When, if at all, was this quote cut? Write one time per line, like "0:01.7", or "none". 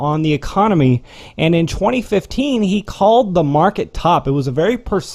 none